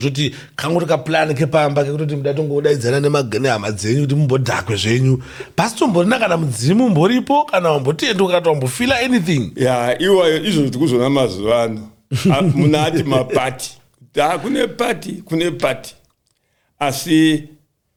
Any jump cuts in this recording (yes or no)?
no